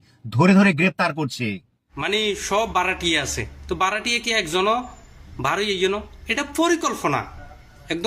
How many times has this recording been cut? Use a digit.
1